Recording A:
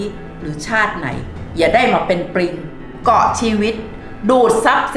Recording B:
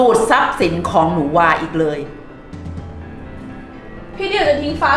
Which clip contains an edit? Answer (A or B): B